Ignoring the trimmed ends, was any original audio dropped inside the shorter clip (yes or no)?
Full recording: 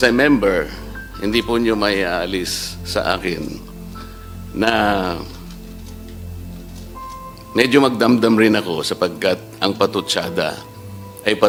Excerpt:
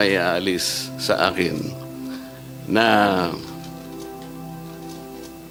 no